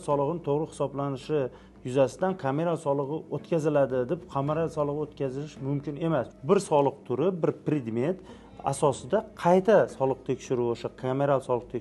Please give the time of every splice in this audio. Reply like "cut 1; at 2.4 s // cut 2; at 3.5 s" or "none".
cut 1; at 6.3 s